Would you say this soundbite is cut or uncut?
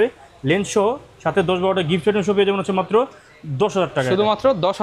uncut